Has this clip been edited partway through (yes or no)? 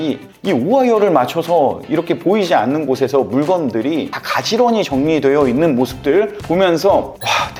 no